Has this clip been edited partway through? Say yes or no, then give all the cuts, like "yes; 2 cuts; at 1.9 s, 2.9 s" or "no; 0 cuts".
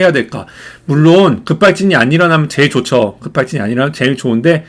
no; 0 cuts